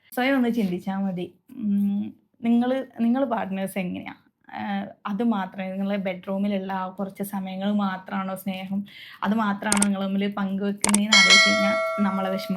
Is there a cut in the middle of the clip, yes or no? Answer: no